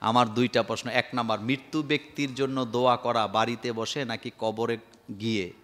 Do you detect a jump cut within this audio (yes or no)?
no